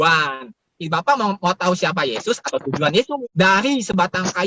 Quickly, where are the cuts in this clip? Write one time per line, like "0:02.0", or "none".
0:03.2